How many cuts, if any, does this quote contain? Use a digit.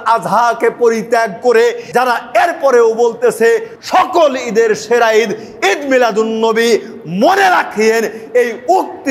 2